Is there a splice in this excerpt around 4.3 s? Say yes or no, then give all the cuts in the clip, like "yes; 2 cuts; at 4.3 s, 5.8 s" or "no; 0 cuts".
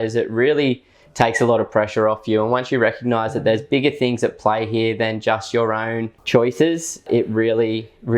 no; 2 cuts; at 6.1 s, 7.0 s